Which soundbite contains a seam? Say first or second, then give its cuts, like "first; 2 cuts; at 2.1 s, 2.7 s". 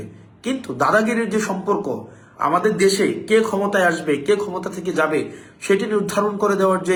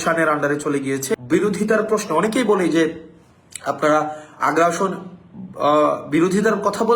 second; 1 cut; at 1.1 s